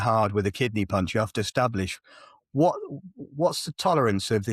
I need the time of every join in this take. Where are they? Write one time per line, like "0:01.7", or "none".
none